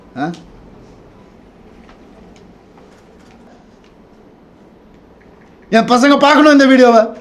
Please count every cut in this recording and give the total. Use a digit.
1